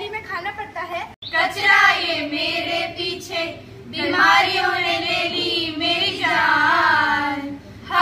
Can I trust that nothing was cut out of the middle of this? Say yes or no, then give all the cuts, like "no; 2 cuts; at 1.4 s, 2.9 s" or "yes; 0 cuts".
no; 1 cut; at 1.2 s